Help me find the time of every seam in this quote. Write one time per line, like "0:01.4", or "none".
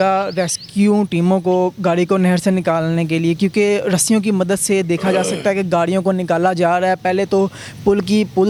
none